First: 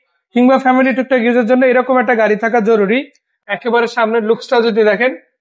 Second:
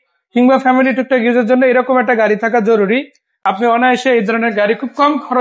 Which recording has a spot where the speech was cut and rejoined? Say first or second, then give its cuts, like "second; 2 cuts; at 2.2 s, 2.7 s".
first; 1 cut; at 3.3 s